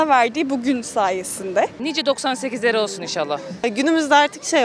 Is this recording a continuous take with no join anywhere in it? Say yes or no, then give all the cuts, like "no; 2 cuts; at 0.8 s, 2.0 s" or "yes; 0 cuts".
no; 2 cuts; at 1.8 s, 3.6 s